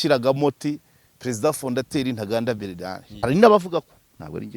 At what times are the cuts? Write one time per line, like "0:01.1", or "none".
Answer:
0:03.1